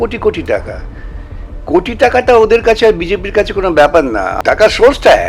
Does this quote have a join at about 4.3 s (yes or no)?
yes